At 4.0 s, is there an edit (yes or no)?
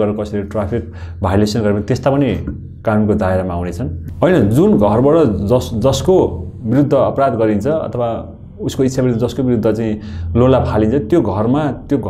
yes